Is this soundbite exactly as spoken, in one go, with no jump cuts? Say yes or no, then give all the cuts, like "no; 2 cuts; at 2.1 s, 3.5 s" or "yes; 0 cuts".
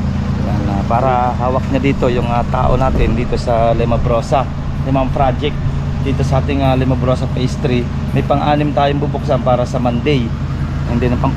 yes; 0 cuts